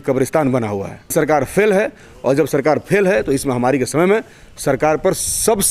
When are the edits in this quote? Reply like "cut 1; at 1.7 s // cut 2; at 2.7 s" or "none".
cut 1; at 1.1 s